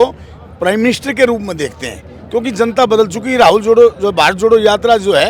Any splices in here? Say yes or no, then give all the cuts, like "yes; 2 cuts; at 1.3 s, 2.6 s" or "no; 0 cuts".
no; 0 cuts